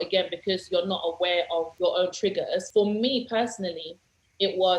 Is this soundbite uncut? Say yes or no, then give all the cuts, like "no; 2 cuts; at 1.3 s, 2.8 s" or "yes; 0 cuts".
no; 2 cuts; at 1.7 s, 2.7 s